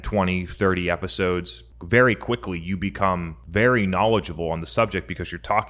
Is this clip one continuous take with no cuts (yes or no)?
no